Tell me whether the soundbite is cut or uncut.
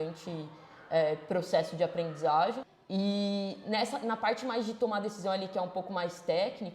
cut